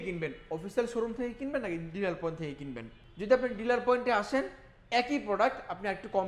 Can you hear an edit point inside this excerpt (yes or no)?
yes